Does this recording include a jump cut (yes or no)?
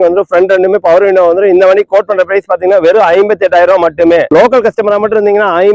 yes